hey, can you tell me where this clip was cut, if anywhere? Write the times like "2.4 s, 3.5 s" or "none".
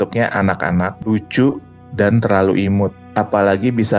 1.0 s, 3.0 s